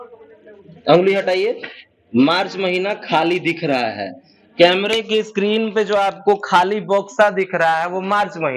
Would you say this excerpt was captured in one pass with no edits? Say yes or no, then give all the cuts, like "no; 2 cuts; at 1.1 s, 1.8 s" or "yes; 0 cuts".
yes; 0 cuts